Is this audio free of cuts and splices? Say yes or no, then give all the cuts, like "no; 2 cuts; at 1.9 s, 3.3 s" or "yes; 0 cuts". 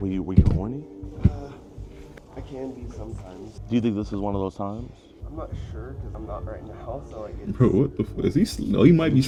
yes; 0 cuts